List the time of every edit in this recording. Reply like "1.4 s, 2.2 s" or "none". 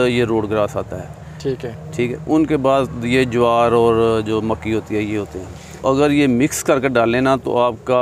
5.8 s